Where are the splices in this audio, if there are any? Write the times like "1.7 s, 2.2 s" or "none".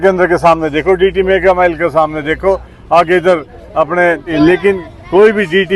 4.3 s